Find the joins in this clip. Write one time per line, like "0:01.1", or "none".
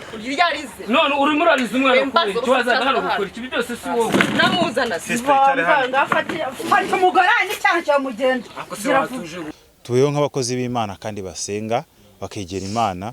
0:09.5

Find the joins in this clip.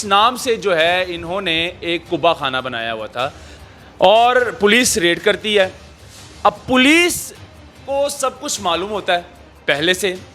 0:03.5

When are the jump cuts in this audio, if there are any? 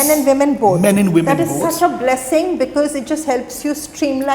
none

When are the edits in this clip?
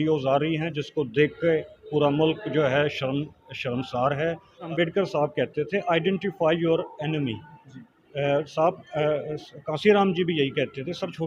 0:04.7

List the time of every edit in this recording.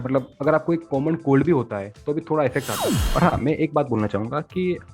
0:02.9

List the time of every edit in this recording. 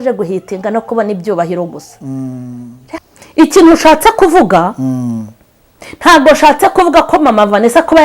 0:03.1

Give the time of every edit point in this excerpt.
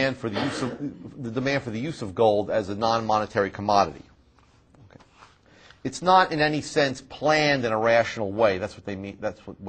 none

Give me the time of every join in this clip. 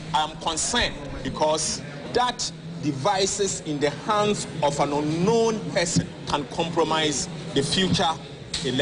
0:01.1
0:02.0
0:06.2
0:07.4

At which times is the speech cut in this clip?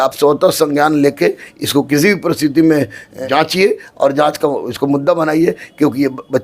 0:03.0

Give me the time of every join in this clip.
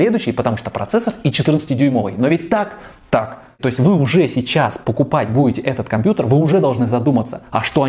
0:03.6

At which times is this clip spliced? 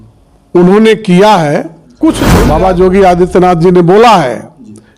0:02.3

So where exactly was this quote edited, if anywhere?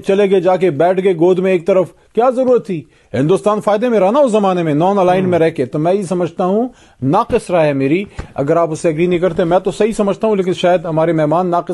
none

